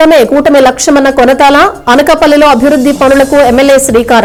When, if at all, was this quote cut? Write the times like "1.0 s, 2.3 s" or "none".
none

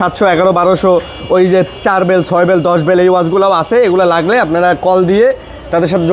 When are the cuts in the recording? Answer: none

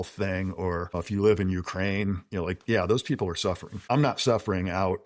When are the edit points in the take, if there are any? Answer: 1.0 s, 3.7 s

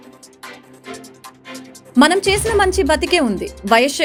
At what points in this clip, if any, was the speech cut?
none

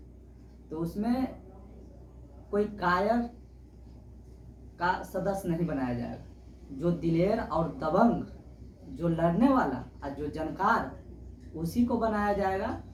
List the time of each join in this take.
none

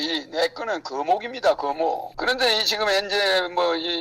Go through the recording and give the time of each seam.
2.1 s

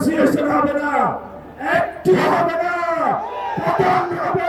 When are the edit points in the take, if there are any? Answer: none

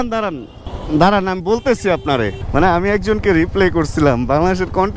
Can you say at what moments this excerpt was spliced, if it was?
2.4 s

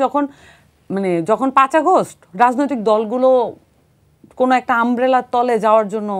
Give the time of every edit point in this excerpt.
none

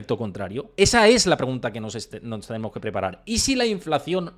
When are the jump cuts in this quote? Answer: none

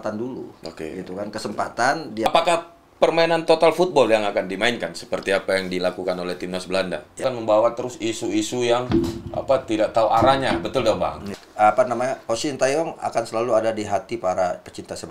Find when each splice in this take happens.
2.3 s, 7.2 s, 11.4 s

